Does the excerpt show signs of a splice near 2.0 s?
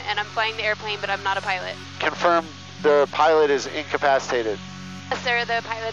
yes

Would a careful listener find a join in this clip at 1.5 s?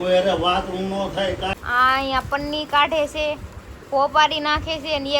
yes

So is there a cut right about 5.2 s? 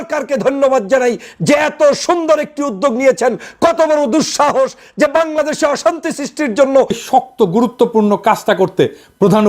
no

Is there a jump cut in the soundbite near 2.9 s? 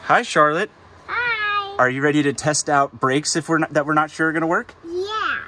no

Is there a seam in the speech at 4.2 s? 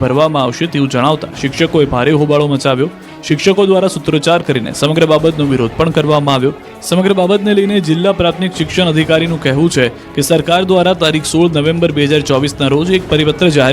no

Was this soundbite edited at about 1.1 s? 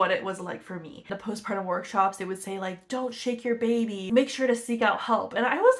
yes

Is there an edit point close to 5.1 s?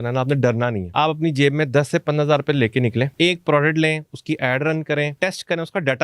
yes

